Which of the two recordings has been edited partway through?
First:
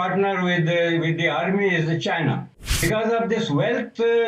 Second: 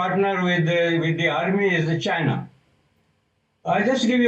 first; 1 cut; at 2.8 s

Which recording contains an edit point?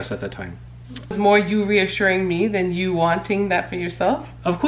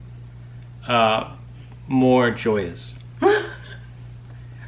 first; 1 cut; at 1.2 s

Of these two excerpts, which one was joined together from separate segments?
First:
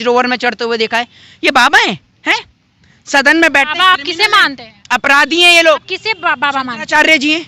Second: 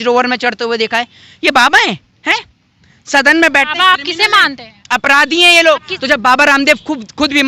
second; 1 cut; at 5.9 s

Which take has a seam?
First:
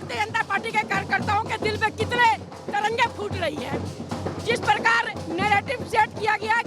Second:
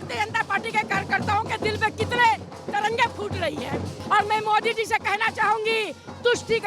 second; 1 cut; at 4.0 s

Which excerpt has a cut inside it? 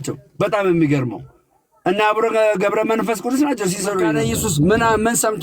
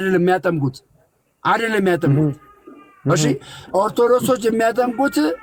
first; 1 cut; at 4.2 s

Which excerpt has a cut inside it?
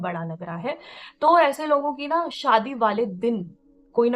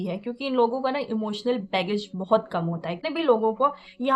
second; 1 cut; at 3.0 s

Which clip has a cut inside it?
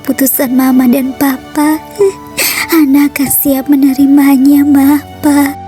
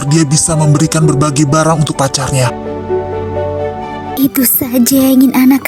second; 1 cut; at 4.0 s

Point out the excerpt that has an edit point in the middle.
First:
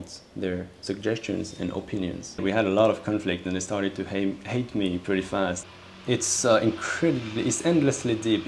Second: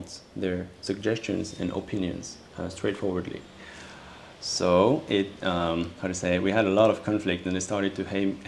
first; 2 cuts; at 2.4 s, 5.6 s

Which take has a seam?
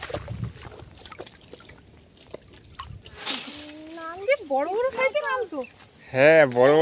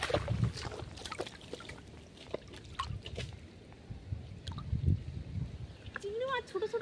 first; 1 cut; at 3.1 s

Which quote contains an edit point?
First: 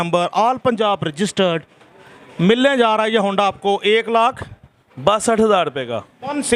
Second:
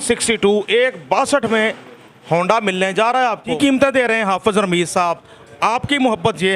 second; 1 cut; at 3.5 s

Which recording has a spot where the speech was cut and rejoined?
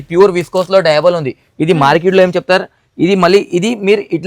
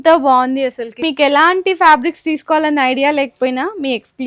second; 1 cut; at 1.0 s

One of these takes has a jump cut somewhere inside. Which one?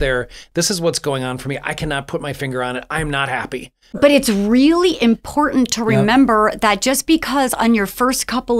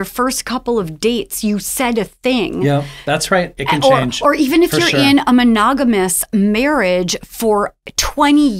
first; 1 cut; at 4.0 s

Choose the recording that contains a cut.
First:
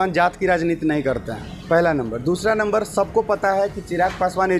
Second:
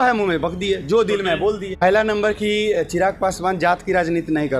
second; 1 cut; at 1.8 s

